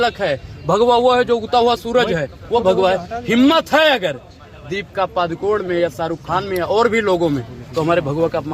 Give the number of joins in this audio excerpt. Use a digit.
0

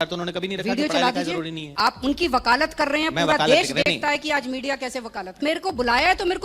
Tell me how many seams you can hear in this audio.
2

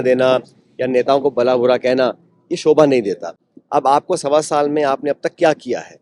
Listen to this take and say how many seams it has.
0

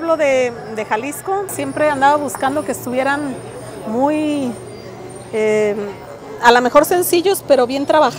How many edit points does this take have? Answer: 1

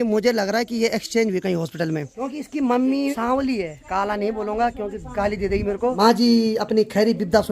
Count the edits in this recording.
3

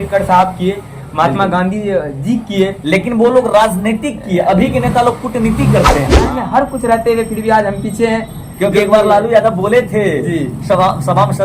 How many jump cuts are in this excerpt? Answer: 1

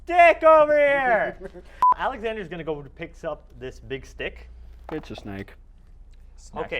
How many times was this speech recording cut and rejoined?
1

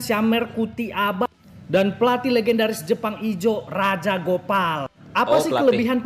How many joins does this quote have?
0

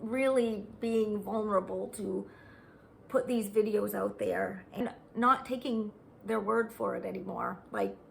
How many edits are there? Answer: 1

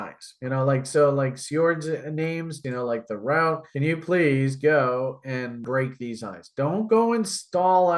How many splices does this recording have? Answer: 2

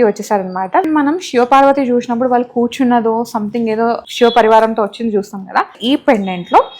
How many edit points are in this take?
3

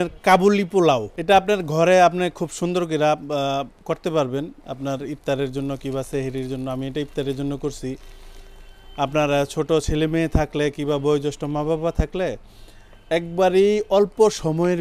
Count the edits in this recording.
1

